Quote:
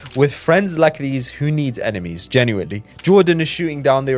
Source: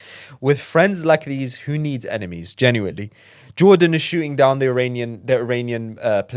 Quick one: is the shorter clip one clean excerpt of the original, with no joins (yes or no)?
no